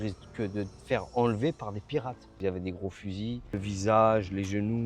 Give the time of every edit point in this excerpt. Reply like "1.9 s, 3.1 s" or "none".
2.4 s, 3.5 s